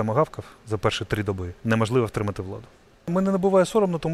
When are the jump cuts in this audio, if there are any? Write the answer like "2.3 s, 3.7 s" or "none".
1.5 s, 3.1 s